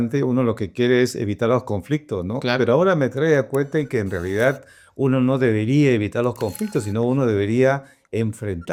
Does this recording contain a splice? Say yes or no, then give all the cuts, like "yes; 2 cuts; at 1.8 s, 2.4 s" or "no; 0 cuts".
no; 0 cuts